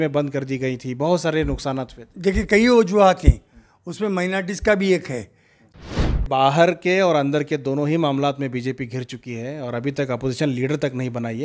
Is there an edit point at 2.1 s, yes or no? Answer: no